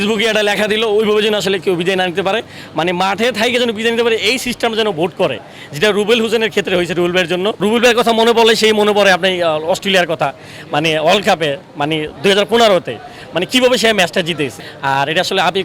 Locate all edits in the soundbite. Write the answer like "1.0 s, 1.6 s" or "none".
7.6 s, 14.5 s